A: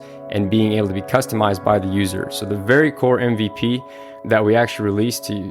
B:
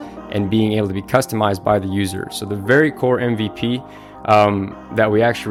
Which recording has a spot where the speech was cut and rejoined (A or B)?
A